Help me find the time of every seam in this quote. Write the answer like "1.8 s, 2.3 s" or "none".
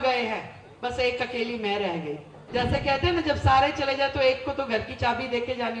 2.3 s